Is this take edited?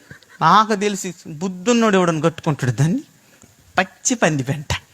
yes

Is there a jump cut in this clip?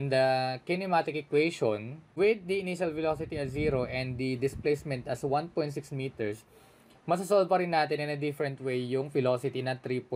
no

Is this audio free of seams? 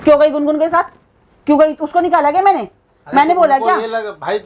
yes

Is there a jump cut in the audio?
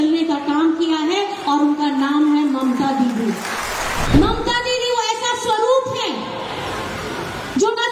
yes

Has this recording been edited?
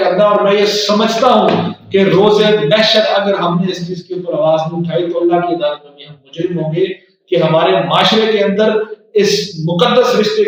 no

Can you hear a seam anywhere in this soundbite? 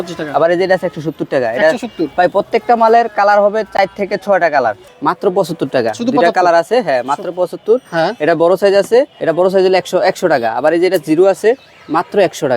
yes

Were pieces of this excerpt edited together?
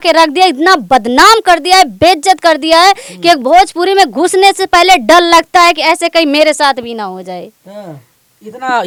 no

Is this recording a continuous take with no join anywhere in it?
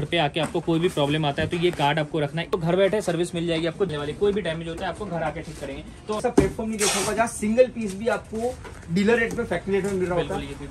no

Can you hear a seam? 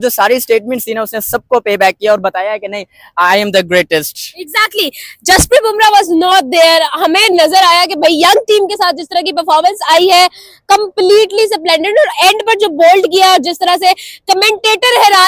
no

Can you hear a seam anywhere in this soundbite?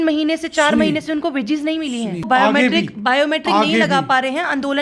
yes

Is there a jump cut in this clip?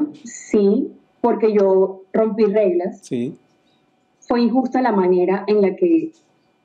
no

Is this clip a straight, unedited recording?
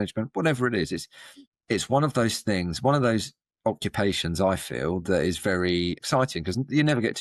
no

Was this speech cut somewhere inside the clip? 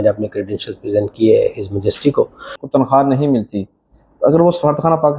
yes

